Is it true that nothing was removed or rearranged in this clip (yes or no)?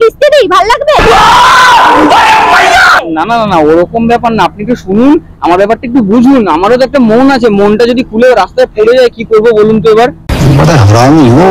yes